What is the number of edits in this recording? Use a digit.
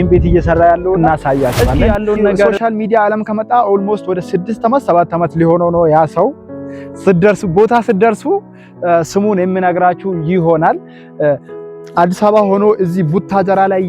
1